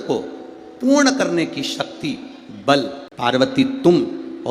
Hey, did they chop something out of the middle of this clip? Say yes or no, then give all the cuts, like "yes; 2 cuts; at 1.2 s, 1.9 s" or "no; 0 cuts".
yes; 1 cut; at 3.0 s